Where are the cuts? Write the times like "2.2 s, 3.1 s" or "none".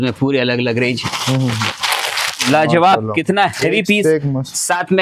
2.4 s